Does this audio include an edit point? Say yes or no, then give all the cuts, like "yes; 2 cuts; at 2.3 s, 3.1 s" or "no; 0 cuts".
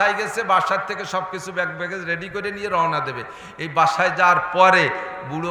no; 0 cuts